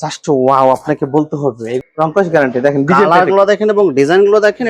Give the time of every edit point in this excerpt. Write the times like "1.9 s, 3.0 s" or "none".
1.7 s